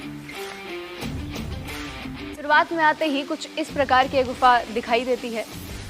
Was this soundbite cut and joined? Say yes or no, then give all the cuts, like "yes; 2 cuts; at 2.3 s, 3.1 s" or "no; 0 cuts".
yes; 1 cut; at 2.4 s